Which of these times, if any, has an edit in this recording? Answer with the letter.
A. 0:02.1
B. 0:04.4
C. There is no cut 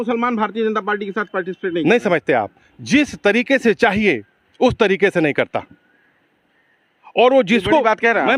C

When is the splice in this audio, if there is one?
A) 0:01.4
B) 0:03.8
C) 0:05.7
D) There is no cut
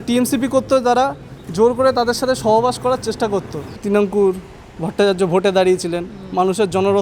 B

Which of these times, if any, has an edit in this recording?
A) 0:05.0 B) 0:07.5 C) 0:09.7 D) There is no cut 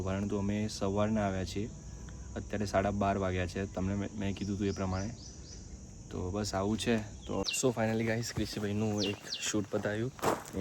B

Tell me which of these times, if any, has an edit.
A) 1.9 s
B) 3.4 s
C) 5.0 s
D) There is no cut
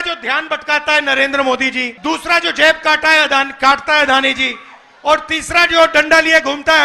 A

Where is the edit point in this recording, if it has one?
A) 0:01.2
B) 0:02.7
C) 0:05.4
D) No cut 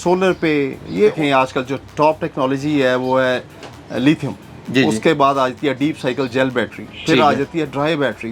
A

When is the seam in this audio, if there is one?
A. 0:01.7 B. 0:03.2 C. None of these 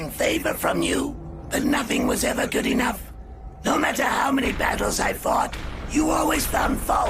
B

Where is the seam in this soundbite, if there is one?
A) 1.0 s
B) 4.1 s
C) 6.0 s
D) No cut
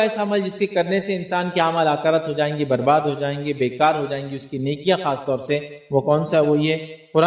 D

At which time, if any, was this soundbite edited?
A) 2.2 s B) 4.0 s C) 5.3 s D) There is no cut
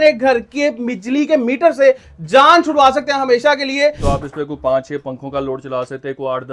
B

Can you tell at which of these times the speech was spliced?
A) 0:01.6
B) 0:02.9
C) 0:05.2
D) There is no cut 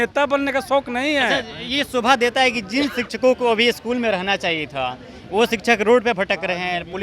D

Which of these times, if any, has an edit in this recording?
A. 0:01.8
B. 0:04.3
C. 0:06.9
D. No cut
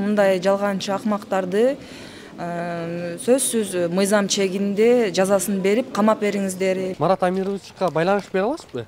C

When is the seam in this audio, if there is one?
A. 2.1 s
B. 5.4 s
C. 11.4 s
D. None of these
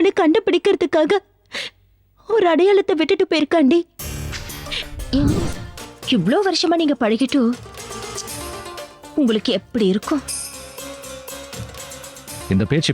B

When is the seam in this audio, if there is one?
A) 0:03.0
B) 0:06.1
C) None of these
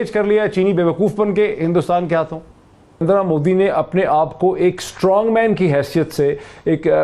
A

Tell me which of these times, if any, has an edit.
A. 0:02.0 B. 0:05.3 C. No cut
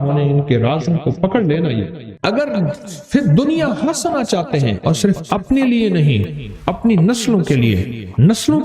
A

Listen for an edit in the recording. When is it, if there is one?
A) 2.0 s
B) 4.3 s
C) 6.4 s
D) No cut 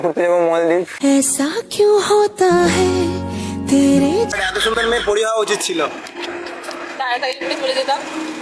B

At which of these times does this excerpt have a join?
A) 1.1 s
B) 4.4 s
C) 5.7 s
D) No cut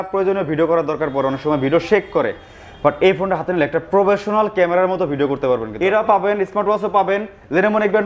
C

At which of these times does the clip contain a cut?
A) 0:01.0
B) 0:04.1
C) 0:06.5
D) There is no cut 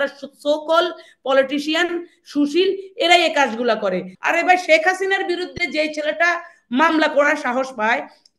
B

